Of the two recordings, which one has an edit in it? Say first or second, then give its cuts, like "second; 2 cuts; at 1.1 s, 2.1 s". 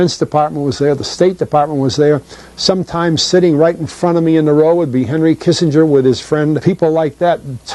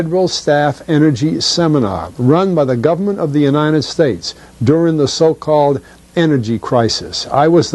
first; 1 cut; at 6.6 s